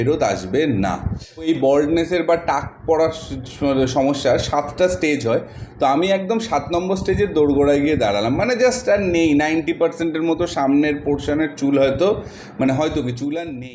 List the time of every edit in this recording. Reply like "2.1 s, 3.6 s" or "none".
1.5 s

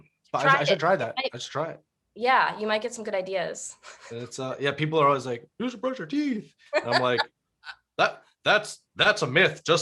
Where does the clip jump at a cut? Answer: none

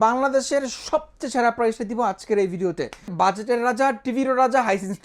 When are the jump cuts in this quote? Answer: 3.1 s

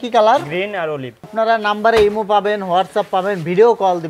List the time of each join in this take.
1.2 s

